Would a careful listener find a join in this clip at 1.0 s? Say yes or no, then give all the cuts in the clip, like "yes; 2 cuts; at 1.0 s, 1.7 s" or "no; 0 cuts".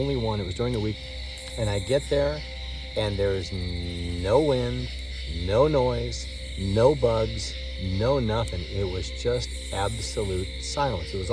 yes; 1 cut; at 1.0 s